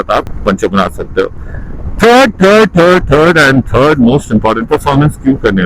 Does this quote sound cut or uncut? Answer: cut